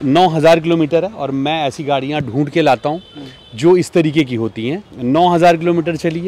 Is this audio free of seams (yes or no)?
yes